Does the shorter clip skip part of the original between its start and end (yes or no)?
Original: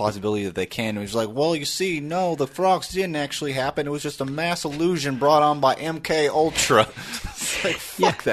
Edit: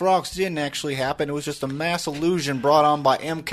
no